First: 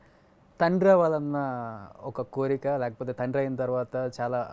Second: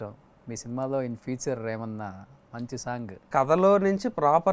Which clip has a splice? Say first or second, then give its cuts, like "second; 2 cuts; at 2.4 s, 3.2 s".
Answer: second; 1 cut; at 3.3 s